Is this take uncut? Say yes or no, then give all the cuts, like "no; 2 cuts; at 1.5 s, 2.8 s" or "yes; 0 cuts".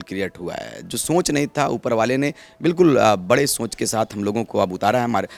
yes; 0 cuts